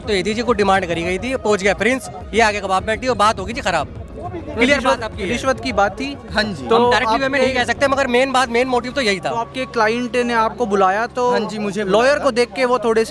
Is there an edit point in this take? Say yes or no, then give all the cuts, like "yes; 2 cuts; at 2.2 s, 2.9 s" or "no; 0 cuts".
no; 0 cuts